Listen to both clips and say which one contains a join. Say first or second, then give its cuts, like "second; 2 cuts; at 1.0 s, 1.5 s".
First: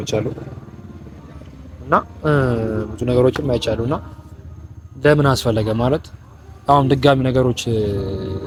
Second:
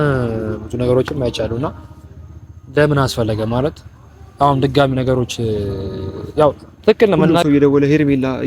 second; 1 cut; at 7.3 s